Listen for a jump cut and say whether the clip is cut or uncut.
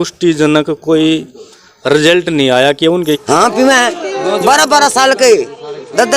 cut